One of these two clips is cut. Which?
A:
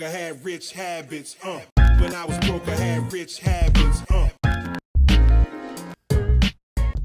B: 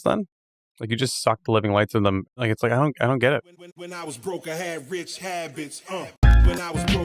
B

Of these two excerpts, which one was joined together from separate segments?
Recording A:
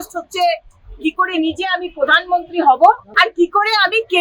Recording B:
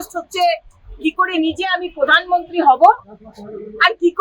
A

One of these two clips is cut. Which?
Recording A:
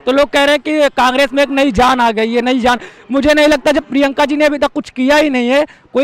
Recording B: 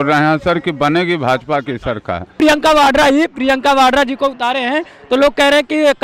B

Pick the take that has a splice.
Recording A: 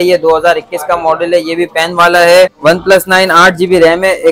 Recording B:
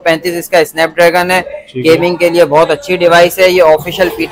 A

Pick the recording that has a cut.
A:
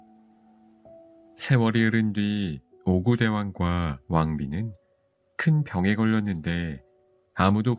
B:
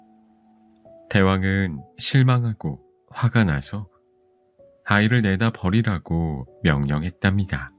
B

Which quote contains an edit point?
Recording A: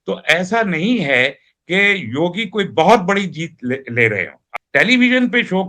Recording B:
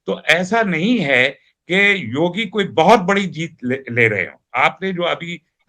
A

